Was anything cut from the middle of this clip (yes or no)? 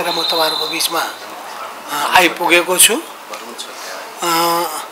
no